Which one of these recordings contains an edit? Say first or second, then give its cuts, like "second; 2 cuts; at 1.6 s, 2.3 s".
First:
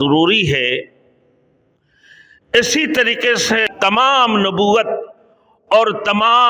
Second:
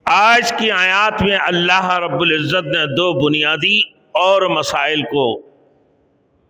first; 1 cut; at 3.7 s